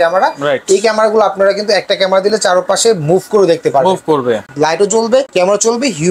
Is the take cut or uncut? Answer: cut